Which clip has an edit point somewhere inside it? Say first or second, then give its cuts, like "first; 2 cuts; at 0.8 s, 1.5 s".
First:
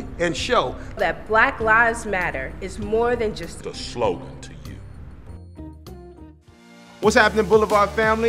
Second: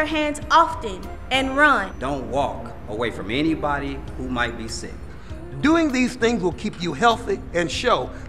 first; 1 cut; at 6.6 s